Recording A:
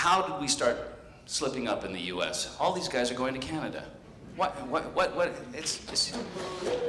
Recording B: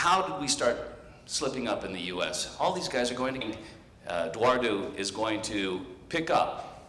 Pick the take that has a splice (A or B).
A